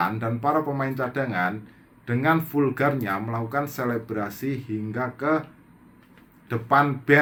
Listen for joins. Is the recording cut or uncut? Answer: uncut